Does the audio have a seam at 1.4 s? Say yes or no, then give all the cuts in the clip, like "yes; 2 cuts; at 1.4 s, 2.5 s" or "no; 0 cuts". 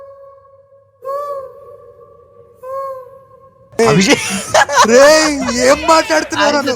no; 1 cut; at 3.8 s